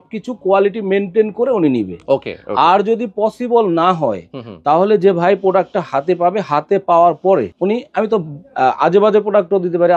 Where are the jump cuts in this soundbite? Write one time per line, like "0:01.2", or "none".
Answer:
none